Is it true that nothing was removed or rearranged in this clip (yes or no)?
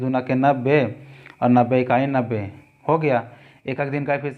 yes